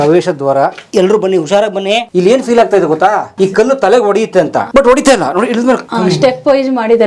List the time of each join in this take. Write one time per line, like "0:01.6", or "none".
0:00.8
0:02.1
0:03.3
0:04.7
0:05.9